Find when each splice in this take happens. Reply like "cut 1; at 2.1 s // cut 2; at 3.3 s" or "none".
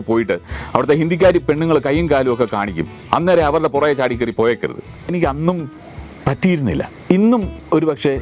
cut 1; at 5.1 s